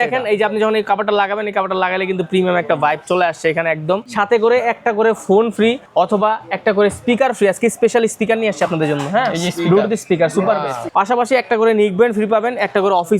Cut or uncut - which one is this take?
cut